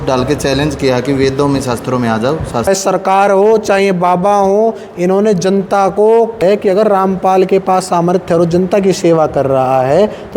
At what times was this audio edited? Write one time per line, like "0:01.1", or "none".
0:02.7
0:06.4